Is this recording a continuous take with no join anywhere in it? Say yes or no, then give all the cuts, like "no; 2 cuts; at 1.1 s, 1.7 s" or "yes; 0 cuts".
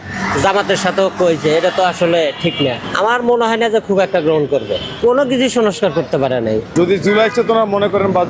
yes; 0 cuts